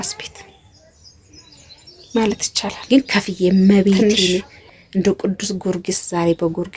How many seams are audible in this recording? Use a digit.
1